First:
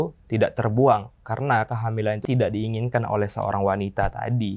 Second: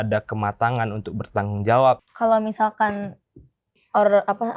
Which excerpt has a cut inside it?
second; 1 cut; at 2.0 s

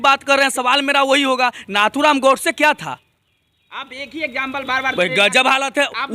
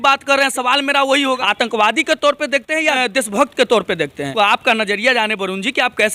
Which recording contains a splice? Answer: second; 3 cuts; at 1.4 s, 3.0 s, 4.3 s

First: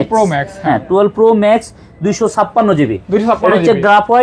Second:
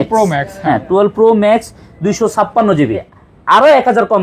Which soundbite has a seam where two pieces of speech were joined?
second; 1 cut; at 3.0 s

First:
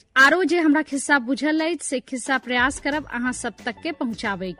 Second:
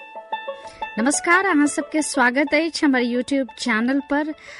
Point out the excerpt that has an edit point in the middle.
second; 1 cut; at 0.9 s

